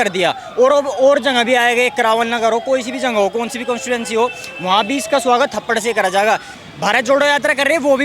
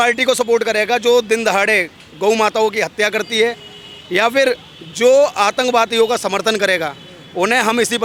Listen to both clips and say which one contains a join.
first; 1 cut; at 6.5 s

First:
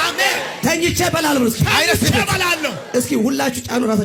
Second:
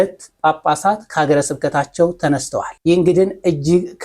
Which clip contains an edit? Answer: second; 1 cut; at 2.8 s

